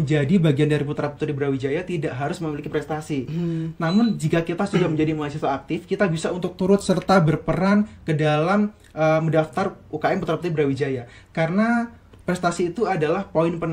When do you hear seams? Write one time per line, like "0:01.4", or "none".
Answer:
none

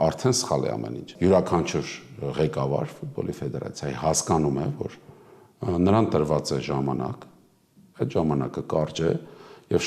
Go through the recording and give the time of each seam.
0:01.1

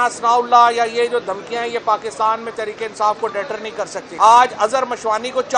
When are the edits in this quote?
0:04.0

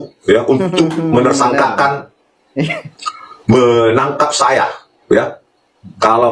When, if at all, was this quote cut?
none

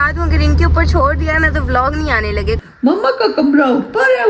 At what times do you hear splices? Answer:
0:02.6

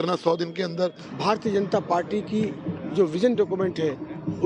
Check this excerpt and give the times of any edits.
0:01.1

